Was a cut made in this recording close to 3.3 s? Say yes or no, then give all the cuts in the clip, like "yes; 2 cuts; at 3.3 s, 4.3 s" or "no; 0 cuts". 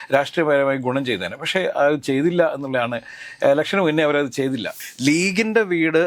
no; 1 cut; at 4.8 s